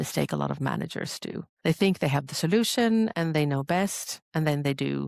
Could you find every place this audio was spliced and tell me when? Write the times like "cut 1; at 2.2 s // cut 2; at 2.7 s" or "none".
cut 1; at 1.5 s